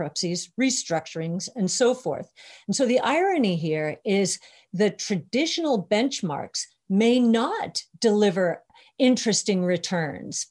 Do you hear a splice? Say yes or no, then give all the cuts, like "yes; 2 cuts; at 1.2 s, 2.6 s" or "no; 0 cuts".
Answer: yes; 1 cut; at 8.7 s